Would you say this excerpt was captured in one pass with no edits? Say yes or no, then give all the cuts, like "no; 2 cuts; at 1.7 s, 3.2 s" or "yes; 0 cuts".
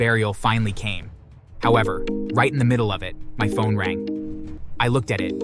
yes; 0 cuts